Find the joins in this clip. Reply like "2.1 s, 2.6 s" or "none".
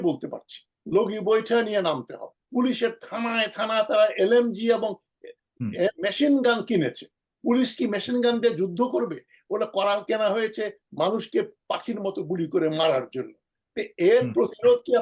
2.4 s